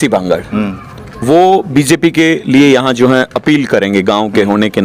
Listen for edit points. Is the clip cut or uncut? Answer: uncut